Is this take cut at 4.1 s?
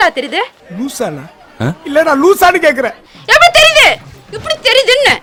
no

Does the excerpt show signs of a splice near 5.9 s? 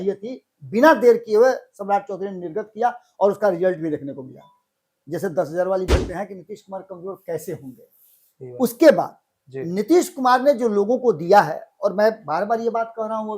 yes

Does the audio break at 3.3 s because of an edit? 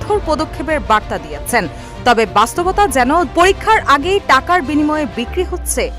yes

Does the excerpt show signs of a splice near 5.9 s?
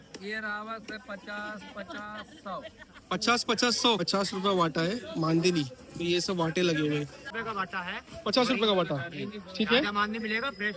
no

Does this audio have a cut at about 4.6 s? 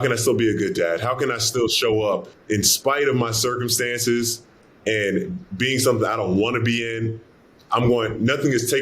no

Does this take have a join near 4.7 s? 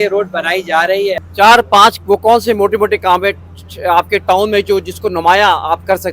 no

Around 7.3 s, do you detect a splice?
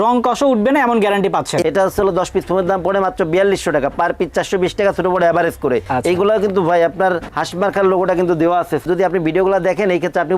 yes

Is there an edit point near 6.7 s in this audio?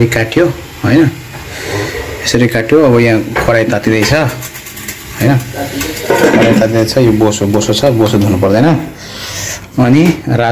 no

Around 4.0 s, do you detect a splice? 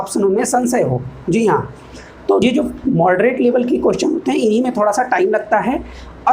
no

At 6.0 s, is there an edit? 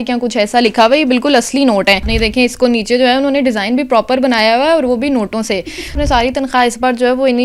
yes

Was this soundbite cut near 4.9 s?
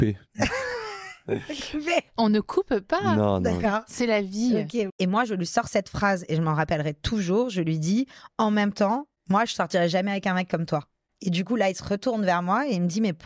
yes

